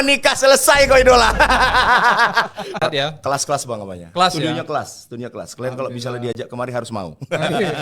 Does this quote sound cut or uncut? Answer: cut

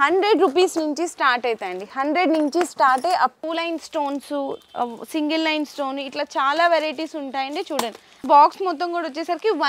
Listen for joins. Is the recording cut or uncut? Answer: cut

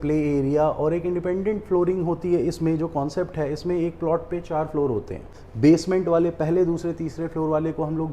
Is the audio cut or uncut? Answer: cut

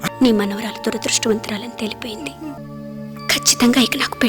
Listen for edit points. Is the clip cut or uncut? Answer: cut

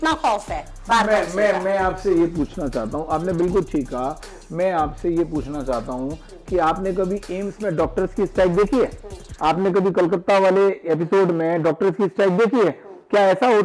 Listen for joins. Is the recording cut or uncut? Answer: uncut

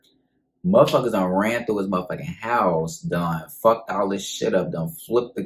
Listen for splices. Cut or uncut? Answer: uncut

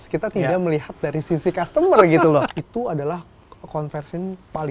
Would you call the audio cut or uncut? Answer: cut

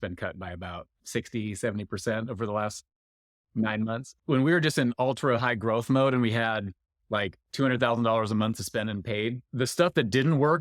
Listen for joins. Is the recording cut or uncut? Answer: cut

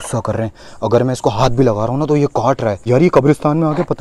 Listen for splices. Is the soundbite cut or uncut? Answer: cut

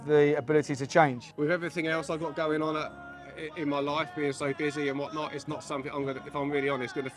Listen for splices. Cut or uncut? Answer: cut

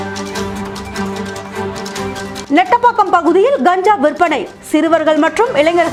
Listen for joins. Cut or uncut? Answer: uncut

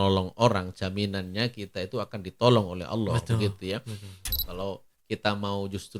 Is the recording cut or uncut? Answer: cut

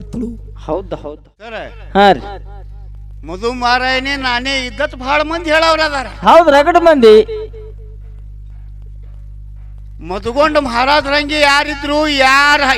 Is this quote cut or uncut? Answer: cut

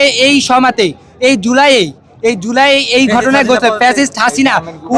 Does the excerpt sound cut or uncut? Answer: uncut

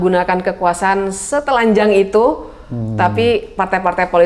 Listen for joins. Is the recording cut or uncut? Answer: uncut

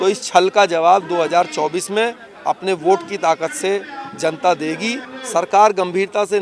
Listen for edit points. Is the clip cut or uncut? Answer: cut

